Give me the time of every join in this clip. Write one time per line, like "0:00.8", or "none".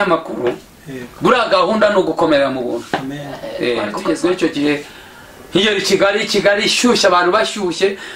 0:03.9